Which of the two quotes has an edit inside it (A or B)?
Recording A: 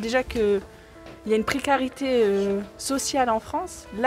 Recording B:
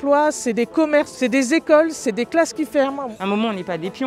B